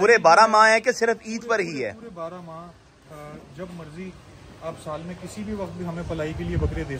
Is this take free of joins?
yes; 0 cuts

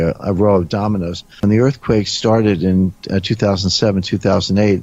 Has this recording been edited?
yes; 1 cut; at 1.4 s

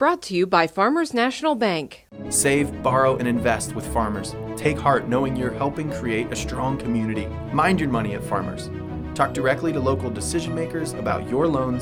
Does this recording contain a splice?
no; 0 cuts

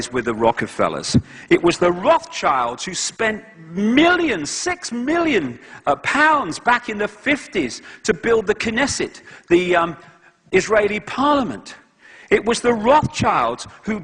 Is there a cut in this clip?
yes; 1 cut; at 7.9 s

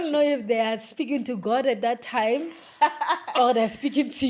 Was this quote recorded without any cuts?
yes; 0 cuts

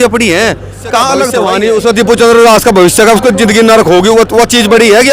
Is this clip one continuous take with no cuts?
no; 1 cut; at 1.3 s

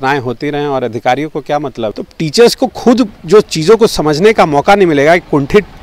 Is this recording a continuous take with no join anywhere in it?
no; 1 cut; at 1.9 s

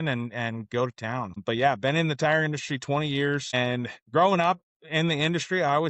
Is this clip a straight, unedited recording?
no; 2 cuts; at 1.4 s, 3.5 s

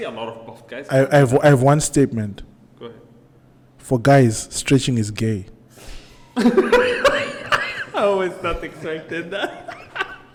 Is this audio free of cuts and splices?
yes; 0 cuts

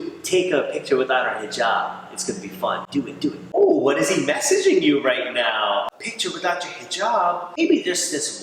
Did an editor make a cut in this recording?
yes; 3 cuts; at 3.5 s, 5.9 s, 7.6 s

